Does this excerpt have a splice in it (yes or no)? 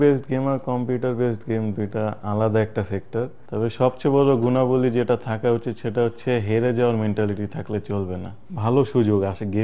yes